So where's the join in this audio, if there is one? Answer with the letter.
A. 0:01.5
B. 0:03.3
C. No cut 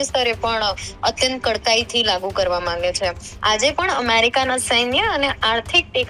B